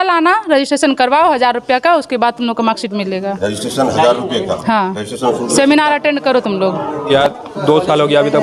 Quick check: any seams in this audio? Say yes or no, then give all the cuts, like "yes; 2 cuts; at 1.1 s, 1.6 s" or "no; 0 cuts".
yes; 1 cut; at 7.1 s